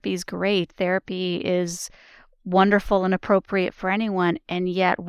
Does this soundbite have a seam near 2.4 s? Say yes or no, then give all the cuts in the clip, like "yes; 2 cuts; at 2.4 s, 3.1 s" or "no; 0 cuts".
no; 0 cuts